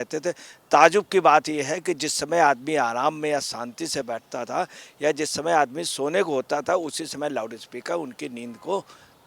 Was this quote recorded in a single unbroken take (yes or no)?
no